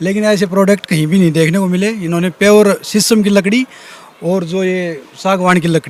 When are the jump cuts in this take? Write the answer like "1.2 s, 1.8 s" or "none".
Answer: none